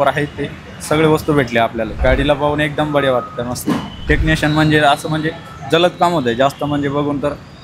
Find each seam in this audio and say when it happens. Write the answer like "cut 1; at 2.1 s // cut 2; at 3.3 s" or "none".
cut 1; at 2.0 s // cut 2; at 4.1 s